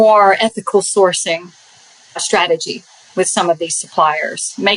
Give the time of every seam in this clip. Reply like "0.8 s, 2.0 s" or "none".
2.2 s